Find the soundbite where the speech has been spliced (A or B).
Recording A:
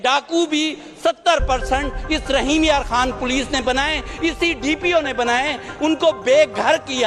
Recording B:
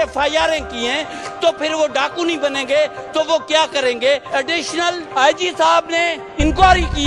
B